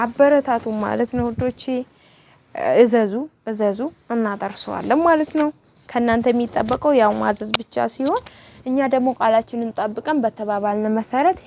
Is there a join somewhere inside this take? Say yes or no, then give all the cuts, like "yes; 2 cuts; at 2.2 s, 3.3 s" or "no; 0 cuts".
no; 0 cuts